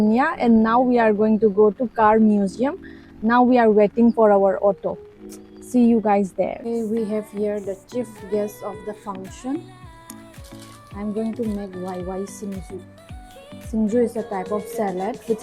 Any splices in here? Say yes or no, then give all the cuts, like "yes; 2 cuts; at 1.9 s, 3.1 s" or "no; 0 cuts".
yes; 1 cut; at 6.7 s